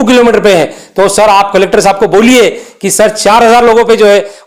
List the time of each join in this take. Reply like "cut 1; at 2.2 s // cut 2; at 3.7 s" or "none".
none